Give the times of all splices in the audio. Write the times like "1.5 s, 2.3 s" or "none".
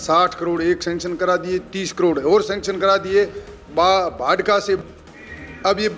4.8 s